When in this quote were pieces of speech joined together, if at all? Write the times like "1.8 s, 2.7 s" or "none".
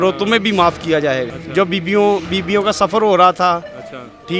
1.4 s